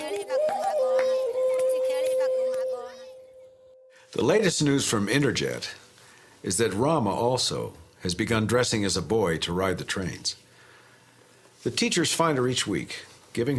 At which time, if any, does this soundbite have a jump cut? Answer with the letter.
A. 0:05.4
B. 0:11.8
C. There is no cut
B